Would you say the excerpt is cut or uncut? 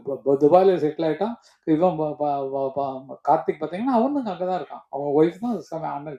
uncut